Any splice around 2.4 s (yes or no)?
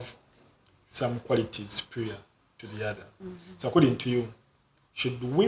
no